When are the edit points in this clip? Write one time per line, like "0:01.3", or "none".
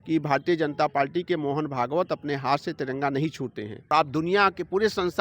0:03.9